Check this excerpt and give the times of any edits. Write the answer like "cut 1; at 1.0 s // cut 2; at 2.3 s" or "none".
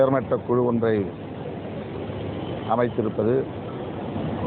none